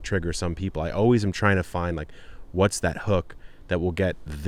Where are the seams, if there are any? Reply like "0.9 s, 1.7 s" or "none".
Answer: none